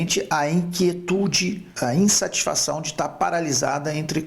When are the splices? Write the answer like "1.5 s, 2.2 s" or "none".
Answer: 1.7 s